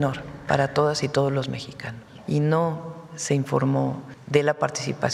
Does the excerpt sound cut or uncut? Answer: cut